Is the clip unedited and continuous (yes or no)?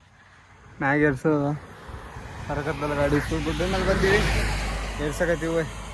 yes